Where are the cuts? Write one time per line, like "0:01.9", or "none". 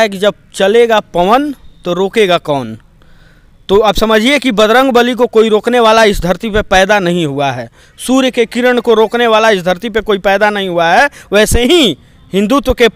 none